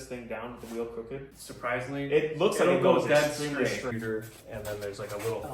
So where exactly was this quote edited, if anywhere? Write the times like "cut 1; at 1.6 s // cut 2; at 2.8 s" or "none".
cut 1; at 1.4 s // cut 2; at 3.9 s